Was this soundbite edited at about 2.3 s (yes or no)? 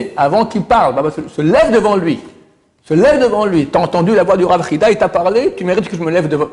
no